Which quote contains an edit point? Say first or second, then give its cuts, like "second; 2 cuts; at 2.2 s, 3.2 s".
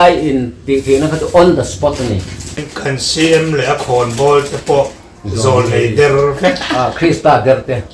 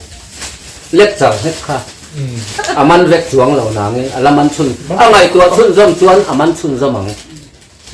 first; 1 cut; at 2.6 s